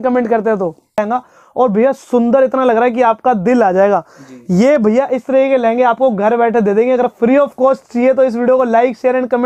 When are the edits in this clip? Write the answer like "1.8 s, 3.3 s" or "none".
1.0 s